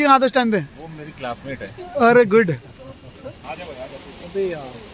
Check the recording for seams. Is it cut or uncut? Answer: cut